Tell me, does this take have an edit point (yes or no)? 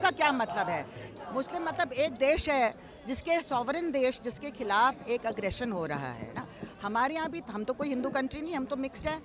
no